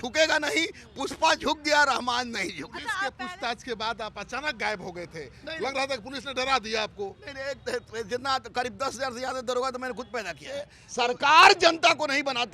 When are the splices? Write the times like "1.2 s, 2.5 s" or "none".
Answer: 3.0 s, 10.8 s